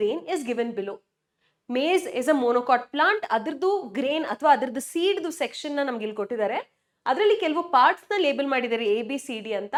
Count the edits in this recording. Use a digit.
0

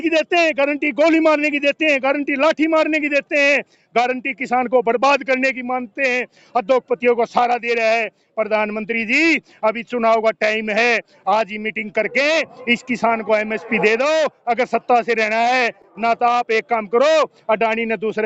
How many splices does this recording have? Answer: 0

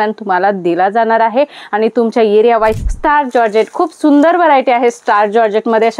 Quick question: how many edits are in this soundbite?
1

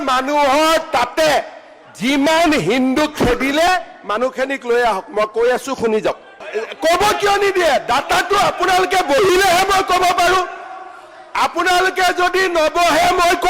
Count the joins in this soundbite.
1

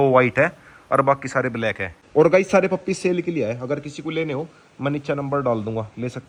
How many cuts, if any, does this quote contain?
0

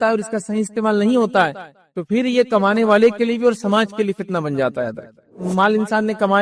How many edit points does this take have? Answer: 1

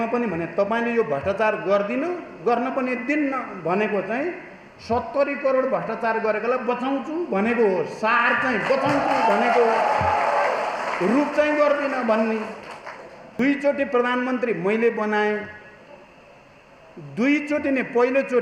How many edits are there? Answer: 1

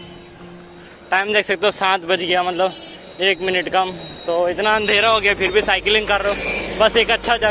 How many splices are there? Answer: 0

